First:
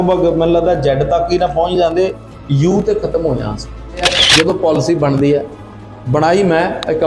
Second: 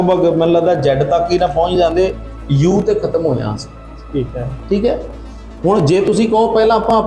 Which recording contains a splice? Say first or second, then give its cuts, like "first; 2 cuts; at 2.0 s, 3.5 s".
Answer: first; 1 cut; at 4.1 s